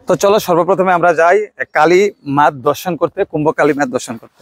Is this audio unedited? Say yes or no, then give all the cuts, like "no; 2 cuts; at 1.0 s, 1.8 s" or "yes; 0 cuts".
yes; 0 cuts